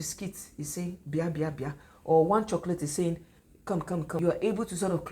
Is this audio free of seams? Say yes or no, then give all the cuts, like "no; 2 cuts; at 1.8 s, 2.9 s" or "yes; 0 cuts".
no; 1 cut; at 4.2 s